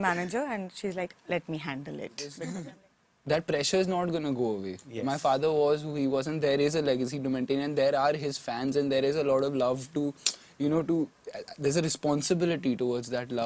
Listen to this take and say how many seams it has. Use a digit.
1